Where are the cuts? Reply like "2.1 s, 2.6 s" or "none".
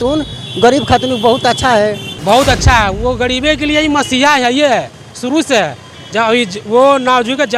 2.1 s